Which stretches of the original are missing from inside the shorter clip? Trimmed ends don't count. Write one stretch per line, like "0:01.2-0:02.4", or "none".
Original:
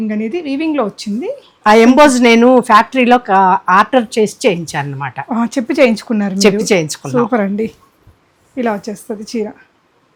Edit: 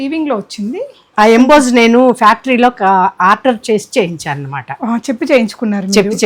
none